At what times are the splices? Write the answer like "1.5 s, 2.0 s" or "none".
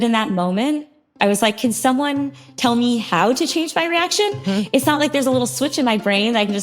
1.1 s